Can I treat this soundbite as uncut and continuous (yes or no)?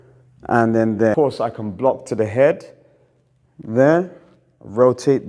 no